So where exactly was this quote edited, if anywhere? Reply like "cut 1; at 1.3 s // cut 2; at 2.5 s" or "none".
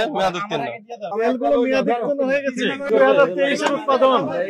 cut 1; at 2.9 s